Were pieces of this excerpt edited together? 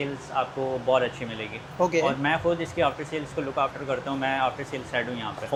no; 0 cuts

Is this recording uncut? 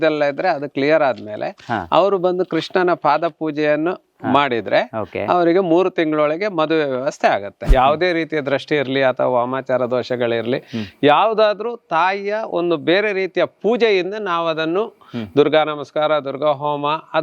no; 1 cut; at 7.6 s

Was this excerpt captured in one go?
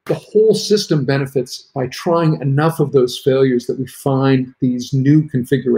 yes; 0 cuts

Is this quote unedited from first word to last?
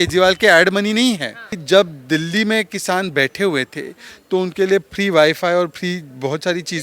no; 1 cut; at 1.6 s

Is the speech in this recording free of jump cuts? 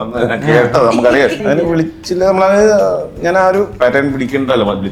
no; 2 cuts; at 1.4 s, 3.7 s

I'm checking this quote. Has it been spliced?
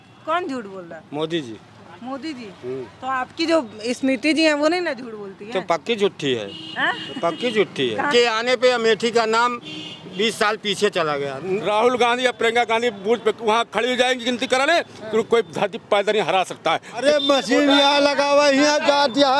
yes; 3 cuts; at 8.1 s, 11.6 s, 17.0 s

